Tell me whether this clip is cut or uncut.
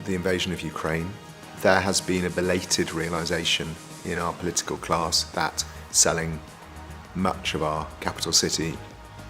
uncut